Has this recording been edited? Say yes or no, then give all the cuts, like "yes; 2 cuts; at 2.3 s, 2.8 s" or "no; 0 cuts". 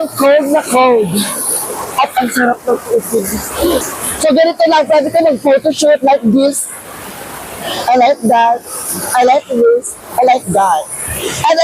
yes; 1 cut; at 3.9 s